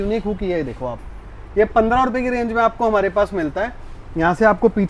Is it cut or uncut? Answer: uncut